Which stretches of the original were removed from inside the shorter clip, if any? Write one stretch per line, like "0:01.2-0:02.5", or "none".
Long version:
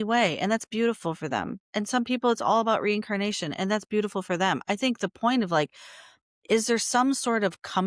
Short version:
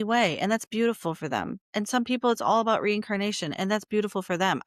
none